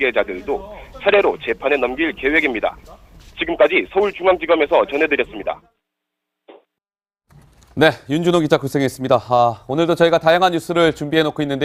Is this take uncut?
yes; 0 cuts

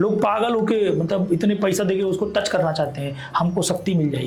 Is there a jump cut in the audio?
no; 0 cuts

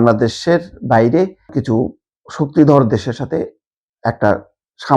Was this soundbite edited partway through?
yes; 1 cut; at 1.6 s

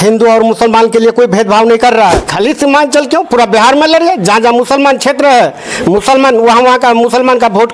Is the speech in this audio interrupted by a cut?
yes; 1 cut; at 2.3 s

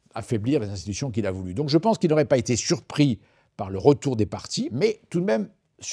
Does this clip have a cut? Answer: yes; 1 cut; at 4.7 s

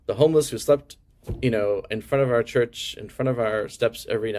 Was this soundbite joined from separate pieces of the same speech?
no; 0 cuts

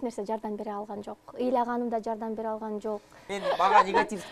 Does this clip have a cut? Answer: yes; 1 cut; at 3.3 s

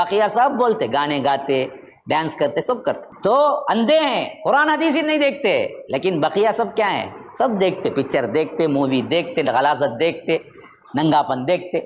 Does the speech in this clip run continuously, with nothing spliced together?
no; 1 cut; at 3.1 s

